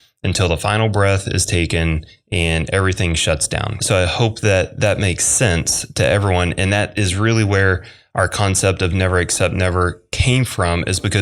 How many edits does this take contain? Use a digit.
1